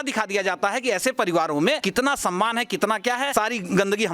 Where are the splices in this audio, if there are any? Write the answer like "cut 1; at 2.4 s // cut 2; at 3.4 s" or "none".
cut 1; at 1.8 s // cut 2; at 3.3 s